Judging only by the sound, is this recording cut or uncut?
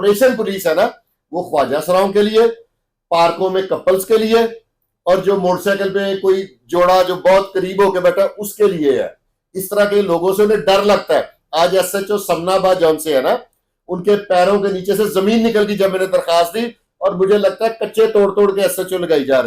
uncut